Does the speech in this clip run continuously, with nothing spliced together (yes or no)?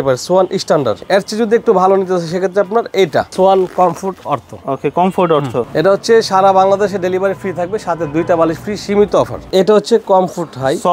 no